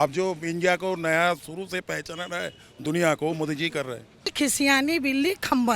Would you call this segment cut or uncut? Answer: cut